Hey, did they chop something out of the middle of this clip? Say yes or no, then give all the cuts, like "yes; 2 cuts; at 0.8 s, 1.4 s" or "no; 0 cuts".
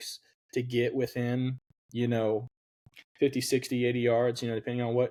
no; 0 cuts